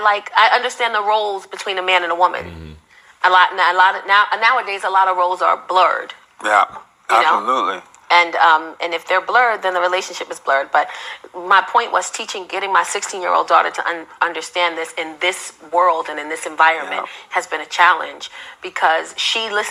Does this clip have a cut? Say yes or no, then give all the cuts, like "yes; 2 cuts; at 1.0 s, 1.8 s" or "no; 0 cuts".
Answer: no; 0 cuts